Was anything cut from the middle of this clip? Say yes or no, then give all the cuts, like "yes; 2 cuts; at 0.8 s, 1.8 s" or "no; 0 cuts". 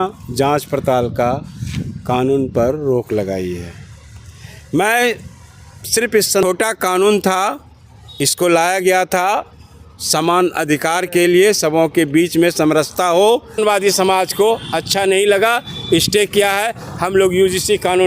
yes; 2 cuts; at 6.4 s, 13.6 s